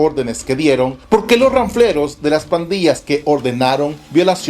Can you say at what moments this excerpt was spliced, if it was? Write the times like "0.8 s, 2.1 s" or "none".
1.0 s